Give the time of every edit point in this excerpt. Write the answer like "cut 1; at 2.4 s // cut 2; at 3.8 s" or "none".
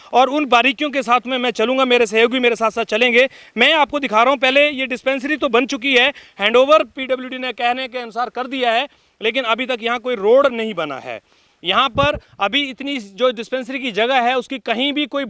none